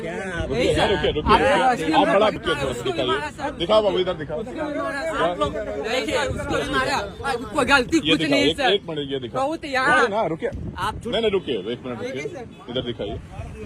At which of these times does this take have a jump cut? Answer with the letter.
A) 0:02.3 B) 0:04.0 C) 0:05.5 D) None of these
A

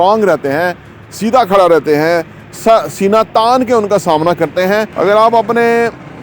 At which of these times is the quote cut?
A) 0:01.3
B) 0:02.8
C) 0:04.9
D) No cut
C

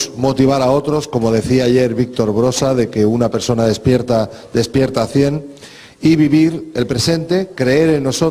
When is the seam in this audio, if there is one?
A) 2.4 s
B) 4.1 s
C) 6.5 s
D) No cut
C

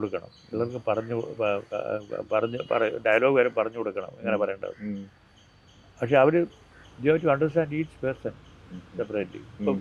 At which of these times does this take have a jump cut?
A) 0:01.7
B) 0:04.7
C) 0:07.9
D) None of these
D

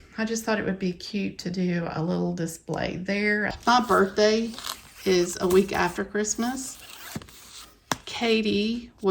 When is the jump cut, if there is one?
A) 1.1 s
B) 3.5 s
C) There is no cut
B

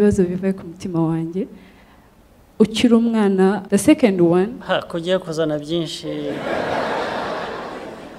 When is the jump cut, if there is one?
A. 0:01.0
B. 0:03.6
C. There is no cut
B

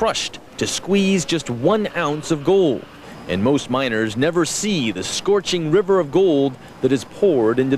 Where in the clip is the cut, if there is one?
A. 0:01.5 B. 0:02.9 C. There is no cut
B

